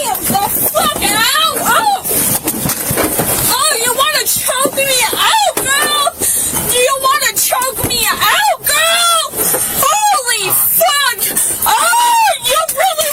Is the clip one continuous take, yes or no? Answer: yes